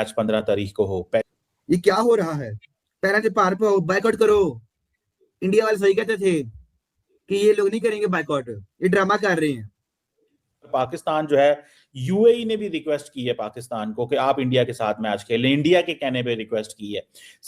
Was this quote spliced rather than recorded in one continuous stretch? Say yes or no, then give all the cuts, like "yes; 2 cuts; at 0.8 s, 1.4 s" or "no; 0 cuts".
yes; 2 cuts; at 1.2 s, 10.7 s